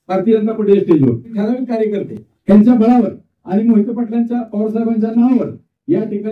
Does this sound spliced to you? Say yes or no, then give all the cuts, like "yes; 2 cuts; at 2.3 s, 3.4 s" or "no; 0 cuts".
yes; 1 cut; at 1.4 s